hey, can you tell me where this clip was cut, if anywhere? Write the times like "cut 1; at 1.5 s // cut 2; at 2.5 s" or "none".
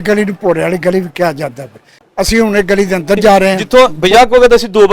cut 1; at 2.0 s // cut 2; at 3.6 s